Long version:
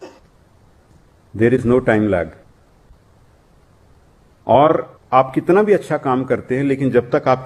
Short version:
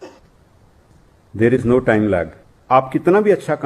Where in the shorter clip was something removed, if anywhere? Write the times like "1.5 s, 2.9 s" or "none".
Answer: 2.5 s

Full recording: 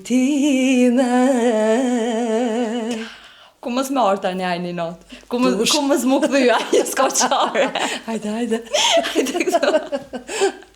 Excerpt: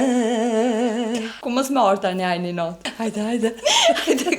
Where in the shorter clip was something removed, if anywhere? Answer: 1.3 s, 2.9 s

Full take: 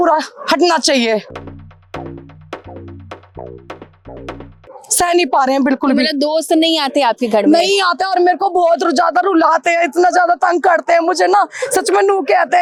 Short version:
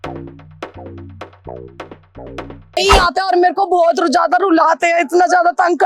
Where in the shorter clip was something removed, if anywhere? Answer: 2.8 s

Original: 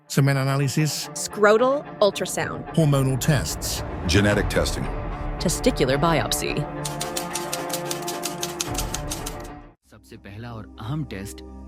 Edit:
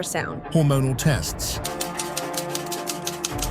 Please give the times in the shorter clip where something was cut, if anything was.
1.6 s

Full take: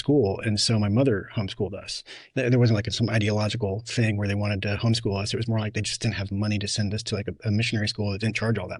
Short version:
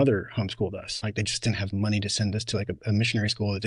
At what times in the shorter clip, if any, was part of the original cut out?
1.2 s

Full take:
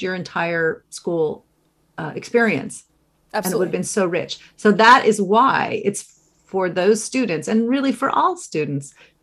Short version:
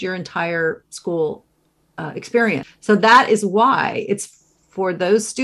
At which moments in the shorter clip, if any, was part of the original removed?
2.7 s

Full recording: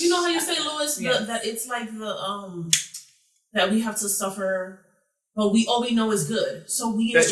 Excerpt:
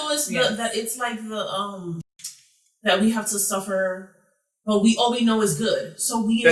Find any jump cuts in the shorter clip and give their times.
none

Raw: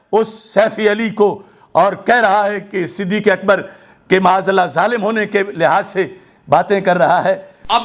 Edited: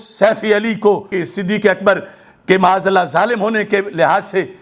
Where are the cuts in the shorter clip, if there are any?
1.2 s

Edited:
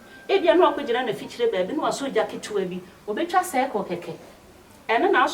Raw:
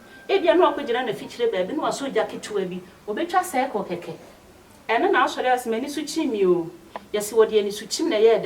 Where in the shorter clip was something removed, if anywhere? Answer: none

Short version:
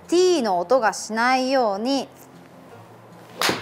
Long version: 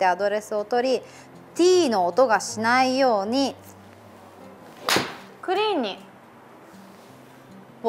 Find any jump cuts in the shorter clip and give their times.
none

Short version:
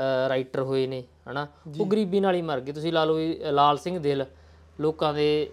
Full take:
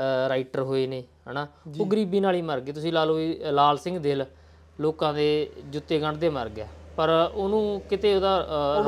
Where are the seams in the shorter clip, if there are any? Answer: none

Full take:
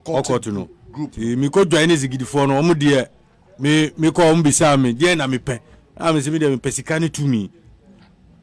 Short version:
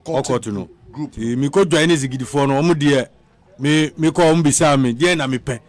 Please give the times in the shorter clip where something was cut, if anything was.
none

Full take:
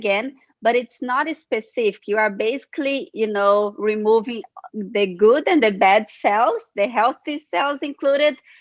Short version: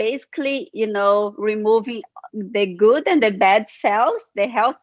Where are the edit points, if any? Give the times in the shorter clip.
none

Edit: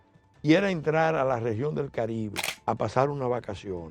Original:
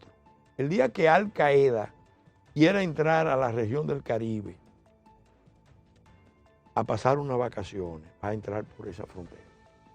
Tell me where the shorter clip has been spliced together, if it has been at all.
2.5 s

